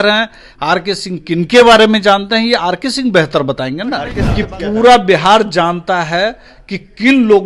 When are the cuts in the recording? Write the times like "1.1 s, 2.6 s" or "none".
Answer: 4.2 s